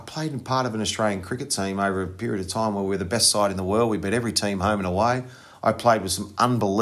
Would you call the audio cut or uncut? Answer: uncut